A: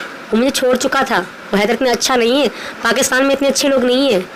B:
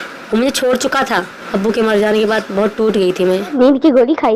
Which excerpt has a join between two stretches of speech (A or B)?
B